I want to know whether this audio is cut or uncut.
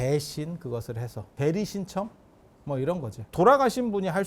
cut